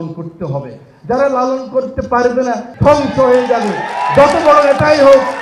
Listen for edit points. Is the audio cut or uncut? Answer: cut